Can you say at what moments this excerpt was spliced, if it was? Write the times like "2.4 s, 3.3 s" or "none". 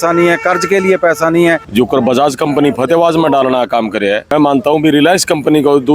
1.6 s